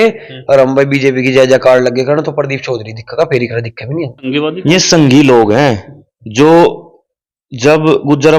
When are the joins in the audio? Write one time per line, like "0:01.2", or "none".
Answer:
0:04.3